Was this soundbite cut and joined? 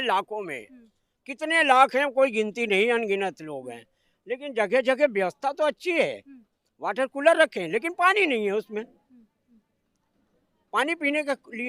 no; 0 cuts

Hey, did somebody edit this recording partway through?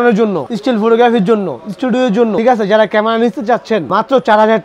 no; 0 cuts

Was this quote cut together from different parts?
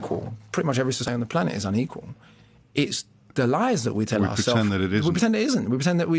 yes; 1 cut; at 1.1 s

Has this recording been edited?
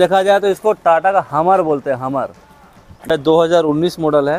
yes; 1 cut; at 3.1 s

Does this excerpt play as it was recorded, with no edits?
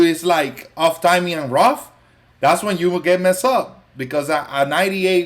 yes; 0 cuts

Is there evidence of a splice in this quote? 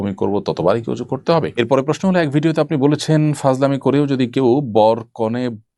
yes; 1 cut; at 1.5 s

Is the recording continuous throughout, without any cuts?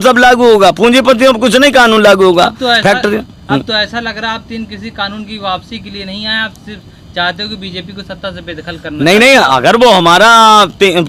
yes; 0 cuts

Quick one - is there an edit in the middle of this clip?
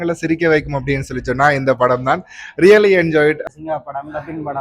yes; 1 cut; at 3.4 s

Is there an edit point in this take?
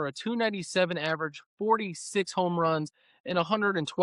no; 0 cuts

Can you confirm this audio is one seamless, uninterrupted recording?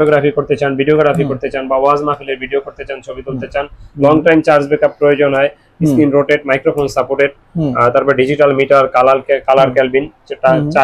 yes; 0 cuts

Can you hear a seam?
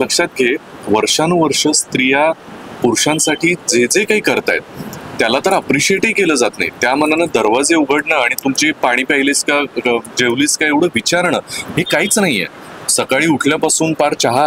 no; 0 cuts

